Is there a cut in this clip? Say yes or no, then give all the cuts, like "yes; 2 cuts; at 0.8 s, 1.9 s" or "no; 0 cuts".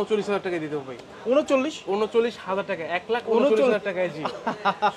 no; 0 cuts